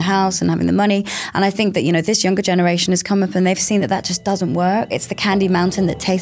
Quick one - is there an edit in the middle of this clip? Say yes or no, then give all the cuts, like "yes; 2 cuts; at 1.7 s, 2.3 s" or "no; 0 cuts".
yes; 1 cut; at 5.0 s